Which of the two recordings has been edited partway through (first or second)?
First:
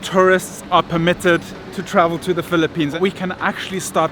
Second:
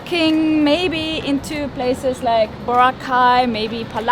first